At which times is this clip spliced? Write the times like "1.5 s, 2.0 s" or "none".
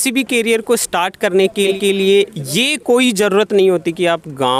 none